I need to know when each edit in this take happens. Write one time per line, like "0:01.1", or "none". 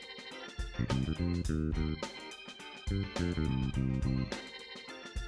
none